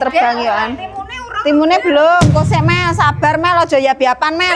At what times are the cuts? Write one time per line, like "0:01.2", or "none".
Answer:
none